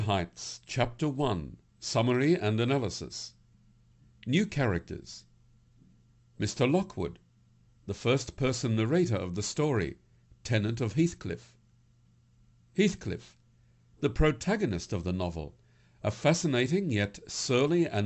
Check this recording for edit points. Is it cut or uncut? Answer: uncut